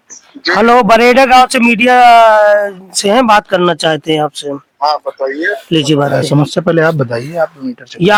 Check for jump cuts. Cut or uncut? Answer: uncut